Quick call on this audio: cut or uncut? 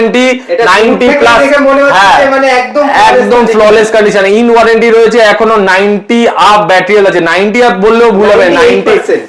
uncut